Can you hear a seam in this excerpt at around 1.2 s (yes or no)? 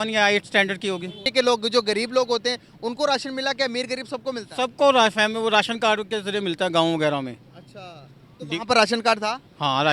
yes